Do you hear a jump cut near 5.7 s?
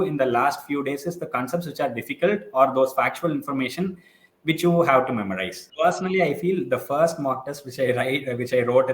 yes; 1 cut; at 5.7 s

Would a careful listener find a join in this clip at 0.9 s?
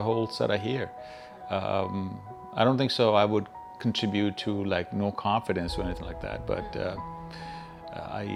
no; 0 cuts

